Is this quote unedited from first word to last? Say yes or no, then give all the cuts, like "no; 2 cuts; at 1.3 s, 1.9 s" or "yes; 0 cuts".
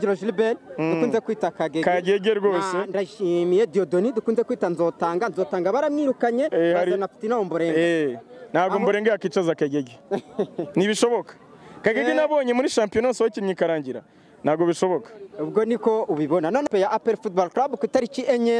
no; 1 cut; at 16.7 s